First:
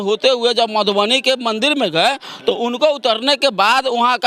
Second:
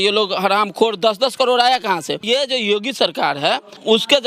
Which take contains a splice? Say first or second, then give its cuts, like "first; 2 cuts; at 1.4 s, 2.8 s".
second; 1 cut; at 2.2 s